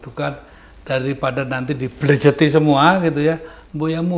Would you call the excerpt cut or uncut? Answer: uncut